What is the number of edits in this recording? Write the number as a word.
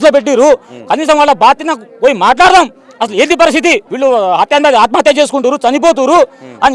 one